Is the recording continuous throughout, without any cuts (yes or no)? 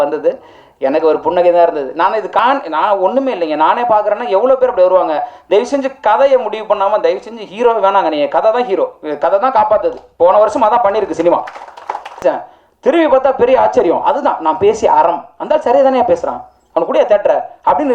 no